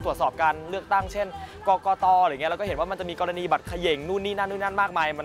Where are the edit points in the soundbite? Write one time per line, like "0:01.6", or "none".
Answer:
none